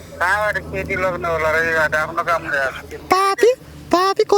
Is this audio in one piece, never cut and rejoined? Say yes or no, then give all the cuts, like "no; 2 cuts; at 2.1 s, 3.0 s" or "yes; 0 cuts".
no; 1 cut; at 2.9 s